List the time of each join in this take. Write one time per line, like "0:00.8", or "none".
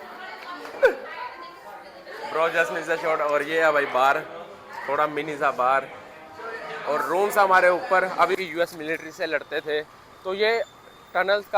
0:08.3